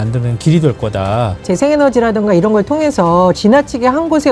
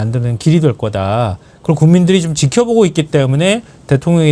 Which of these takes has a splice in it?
first; 1 cut; at 1.4 s

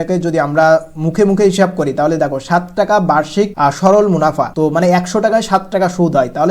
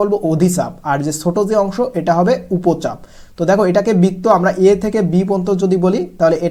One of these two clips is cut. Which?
first; 2 cuts; at 3.5 s, 4.5 s

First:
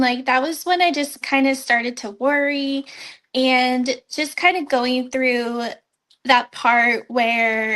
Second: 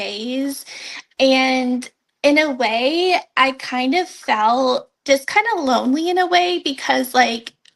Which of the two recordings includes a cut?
second; 1 cut; at 4.9 s

